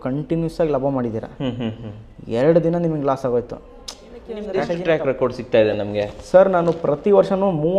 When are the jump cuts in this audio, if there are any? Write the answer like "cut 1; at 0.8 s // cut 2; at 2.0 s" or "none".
cut 1; at 4.6 s